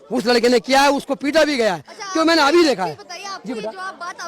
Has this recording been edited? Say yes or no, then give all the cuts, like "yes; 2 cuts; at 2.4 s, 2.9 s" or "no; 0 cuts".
no; 0 cuts